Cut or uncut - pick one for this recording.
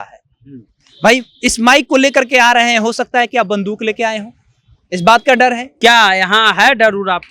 cut